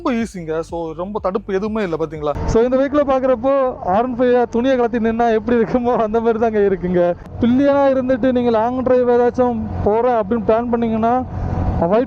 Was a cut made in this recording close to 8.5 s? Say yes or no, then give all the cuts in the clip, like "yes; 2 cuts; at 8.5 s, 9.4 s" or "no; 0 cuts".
no; 2 cuts; at 2.4 s, 7.3 s